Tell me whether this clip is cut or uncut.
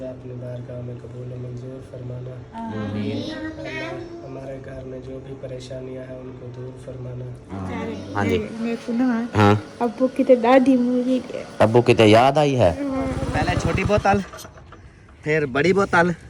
cut